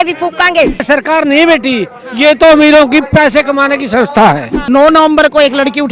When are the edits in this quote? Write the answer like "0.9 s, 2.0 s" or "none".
0.8 s, 4.5 s